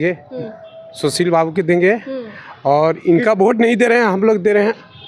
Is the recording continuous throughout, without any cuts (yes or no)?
yes